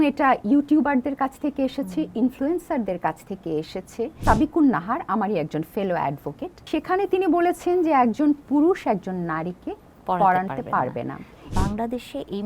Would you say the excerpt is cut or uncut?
cut